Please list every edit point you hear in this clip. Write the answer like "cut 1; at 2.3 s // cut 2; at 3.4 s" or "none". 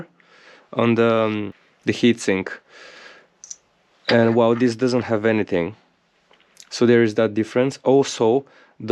none